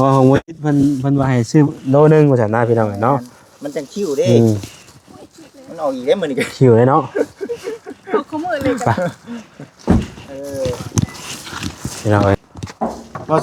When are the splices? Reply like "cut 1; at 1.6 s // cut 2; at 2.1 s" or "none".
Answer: cut 1; at 12.5 s